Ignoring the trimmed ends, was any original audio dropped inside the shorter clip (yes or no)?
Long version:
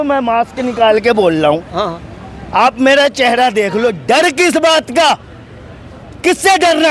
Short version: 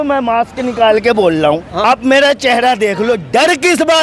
yes